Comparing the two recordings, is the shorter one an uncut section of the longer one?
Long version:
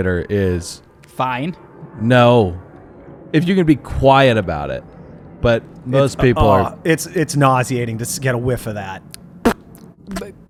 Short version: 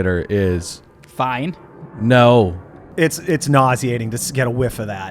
no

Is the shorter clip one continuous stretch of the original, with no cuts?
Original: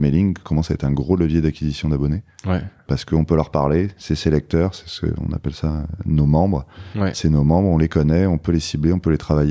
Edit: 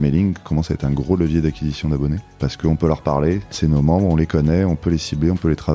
no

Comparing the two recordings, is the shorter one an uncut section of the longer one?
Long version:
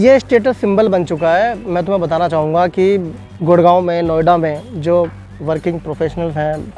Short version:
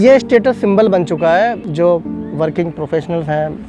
no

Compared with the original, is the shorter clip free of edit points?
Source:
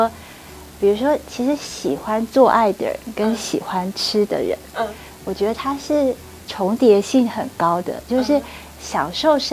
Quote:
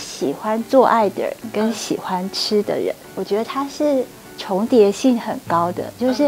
no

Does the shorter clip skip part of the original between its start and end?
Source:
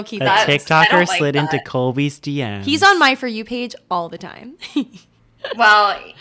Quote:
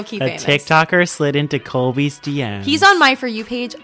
no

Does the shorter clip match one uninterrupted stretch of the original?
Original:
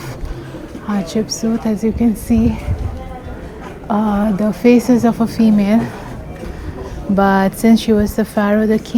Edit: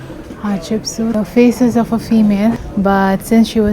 no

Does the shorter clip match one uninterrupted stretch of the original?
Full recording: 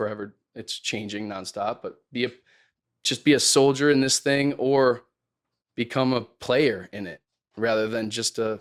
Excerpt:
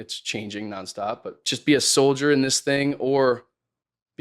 no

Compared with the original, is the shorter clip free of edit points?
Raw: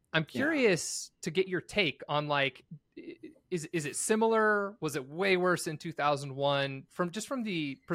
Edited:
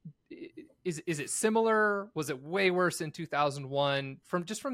yes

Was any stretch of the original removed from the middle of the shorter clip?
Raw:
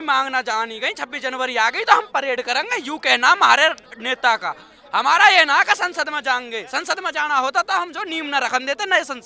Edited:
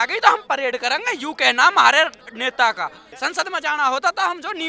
yes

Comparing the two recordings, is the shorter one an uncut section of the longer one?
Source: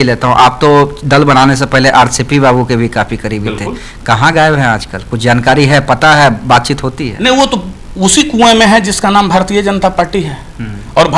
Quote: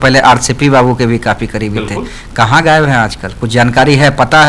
yes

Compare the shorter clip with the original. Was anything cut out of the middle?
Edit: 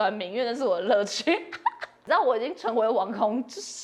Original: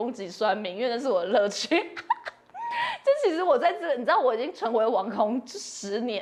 yes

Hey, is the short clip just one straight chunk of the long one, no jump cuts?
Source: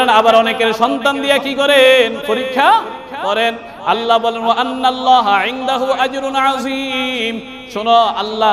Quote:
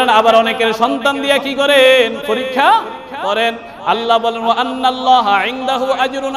yes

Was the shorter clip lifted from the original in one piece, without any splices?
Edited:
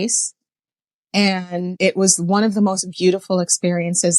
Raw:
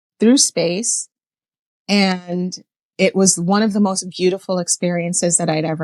no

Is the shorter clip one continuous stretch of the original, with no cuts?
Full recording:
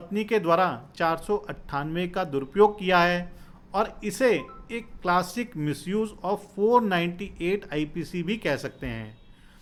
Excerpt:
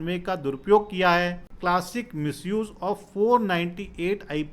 no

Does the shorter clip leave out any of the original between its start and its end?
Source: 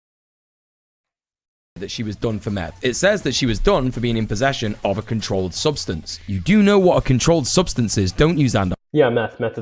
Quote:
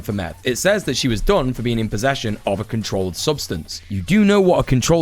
no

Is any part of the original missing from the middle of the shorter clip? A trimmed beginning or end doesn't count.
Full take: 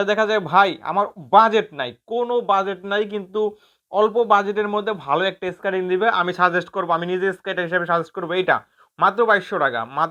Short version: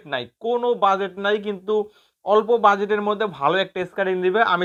no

